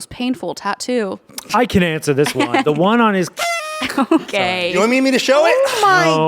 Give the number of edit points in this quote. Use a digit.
1